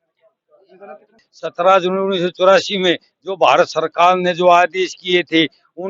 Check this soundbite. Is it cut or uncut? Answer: cut